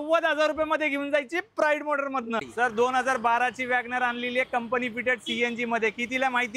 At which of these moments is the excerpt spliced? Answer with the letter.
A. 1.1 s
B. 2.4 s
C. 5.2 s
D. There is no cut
B